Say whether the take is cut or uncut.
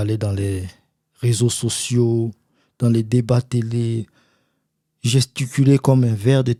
uncut